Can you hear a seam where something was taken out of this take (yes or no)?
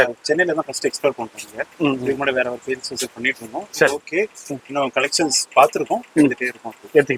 no